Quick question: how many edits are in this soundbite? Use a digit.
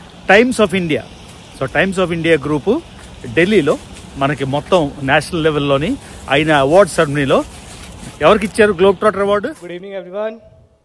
1